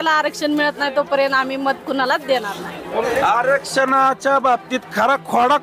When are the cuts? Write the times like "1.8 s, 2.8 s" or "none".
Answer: 3.1 s